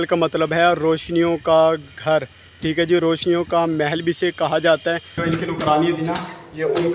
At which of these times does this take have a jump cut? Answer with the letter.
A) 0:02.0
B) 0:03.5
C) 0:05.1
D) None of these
C